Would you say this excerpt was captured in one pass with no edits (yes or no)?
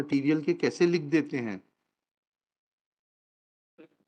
yes